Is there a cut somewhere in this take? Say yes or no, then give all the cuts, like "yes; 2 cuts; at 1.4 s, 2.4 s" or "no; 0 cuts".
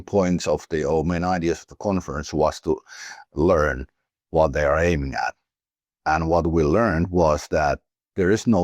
no; 0 cuts